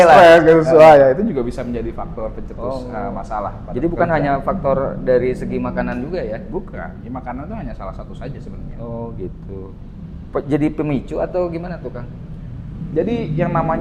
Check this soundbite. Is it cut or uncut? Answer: uncut